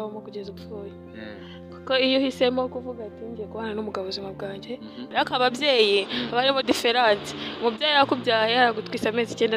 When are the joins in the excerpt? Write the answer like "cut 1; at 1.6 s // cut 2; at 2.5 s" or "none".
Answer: cut 1; at 5.0 s